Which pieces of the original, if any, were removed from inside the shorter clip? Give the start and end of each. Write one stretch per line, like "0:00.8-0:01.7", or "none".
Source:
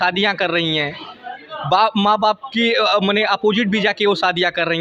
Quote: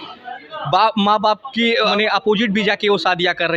0:02.9-0:03.1